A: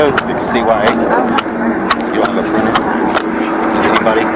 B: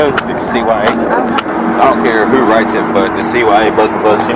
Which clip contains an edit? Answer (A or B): B